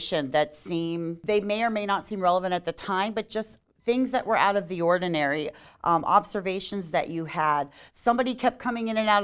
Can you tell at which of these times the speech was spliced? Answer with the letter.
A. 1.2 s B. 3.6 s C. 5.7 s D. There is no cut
A